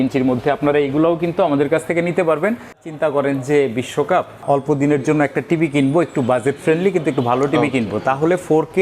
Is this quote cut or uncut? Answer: cut